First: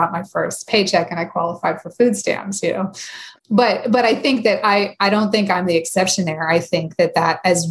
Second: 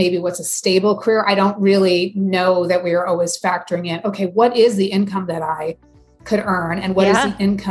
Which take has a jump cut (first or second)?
first